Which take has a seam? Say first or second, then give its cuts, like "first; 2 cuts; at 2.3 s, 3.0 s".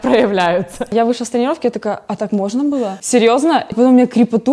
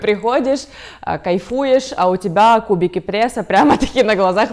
first; 4 cuts; at 0.9 s, 2.0 s, 3.0 s, 3.7 s